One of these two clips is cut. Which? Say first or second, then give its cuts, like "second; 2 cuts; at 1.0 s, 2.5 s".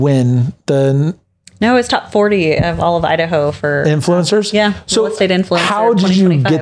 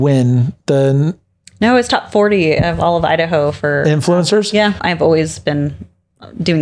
second; 1 cut; at 4.9 s